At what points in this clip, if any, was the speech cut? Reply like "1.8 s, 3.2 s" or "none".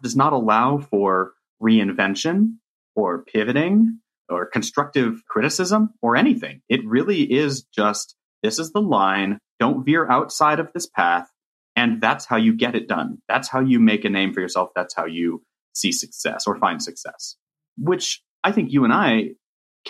4.2 s, 5.3 s, 9.6 s, 17.8 s